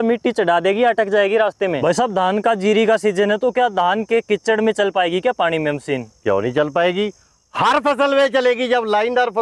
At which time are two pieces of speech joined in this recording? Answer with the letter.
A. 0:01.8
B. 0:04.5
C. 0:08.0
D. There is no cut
A